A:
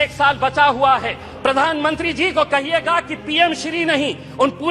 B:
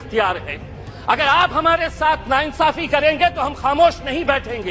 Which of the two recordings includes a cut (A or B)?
A